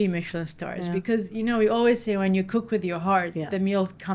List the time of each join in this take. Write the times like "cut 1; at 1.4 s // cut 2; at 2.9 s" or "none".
none